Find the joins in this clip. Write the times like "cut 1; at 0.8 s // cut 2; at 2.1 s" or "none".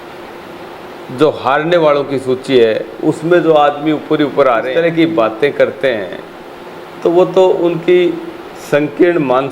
cut 1; at 4.7 s